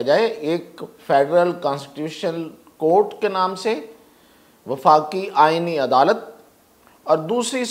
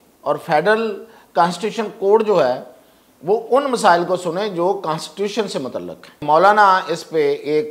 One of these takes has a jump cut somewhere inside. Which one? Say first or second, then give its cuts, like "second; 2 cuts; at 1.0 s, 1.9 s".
second; 1 cut; at 6.1 s